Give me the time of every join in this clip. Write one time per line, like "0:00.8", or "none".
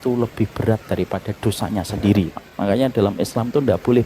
0:02.4